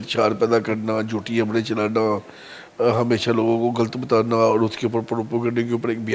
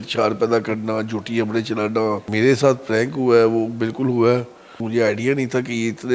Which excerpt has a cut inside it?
second; 2 cuts; at 2.2 s, 4.8 s

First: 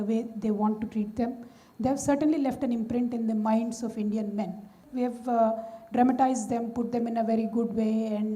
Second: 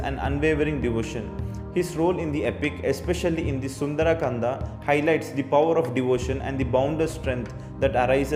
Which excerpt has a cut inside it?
first; 1 cut; at 4.8 s

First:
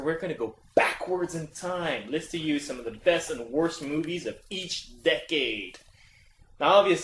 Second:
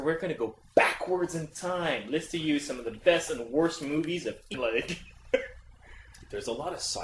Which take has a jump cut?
first; 1 cut; at 4.5 s

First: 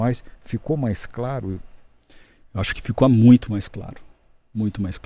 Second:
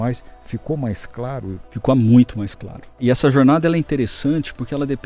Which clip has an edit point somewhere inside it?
second; 2 cuts; at 1.7 s, 3.0 s

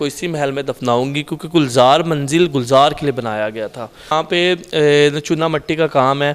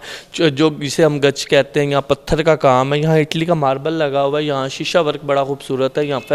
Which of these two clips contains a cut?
first; 1 cut; at 4.1 s

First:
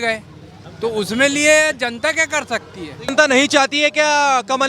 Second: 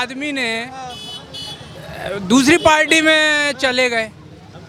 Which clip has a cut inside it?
first; 1 cut; at 3.1 s

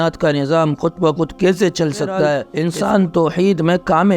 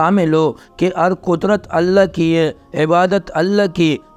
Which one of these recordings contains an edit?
first; 1 cut; at 2.5 s

